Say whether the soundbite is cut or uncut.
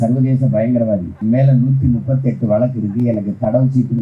cut